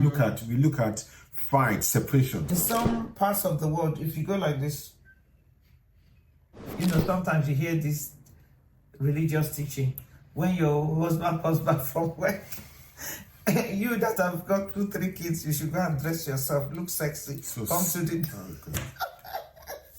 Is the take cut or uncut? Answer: cut